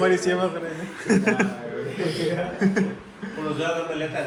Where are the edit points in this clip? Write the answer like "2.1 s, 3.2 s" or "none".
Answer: none